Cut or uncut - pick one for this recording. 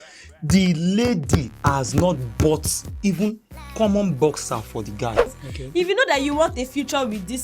cut